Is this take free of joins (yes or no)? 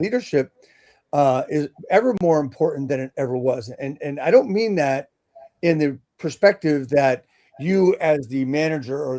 yes